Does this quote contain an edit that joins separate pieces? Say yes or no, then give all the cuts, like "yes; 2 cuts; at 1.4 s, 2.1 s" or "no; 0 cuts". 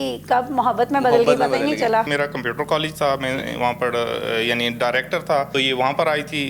yes; 2 cuts; at 2.1 s, 5.5 s